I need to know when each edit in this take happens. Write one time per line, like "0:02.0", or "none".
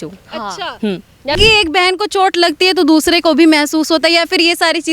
0:01.4